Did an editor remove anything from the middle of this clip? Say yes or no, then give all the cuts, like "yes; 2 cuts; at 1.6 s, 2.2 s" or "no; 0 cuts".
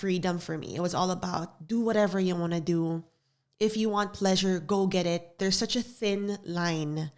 yes; 1 cut; at 5.3 s